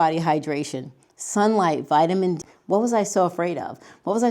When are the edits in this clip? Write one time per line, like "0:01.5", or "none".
0:02.4